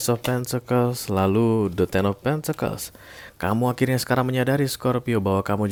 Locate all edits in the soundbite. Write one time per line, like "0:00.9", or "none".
none

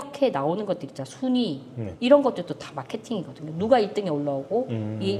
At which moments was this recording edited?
none

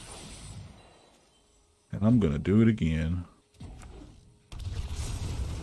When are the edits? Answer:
0:03.4

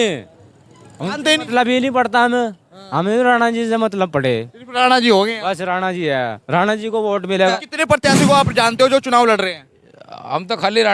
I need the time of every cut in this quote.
0:07.5

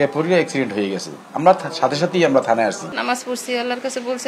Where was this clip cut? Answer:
0:02.9

